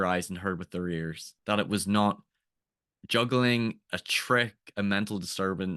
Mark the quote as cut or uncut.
uncut